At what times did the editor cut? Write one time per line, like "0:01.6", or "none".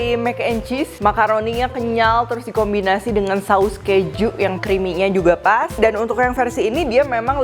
0:00.9
0:04.6
0:05.7